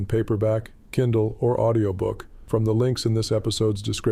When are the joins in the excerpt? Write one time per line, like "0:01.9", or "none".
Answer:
0:02.3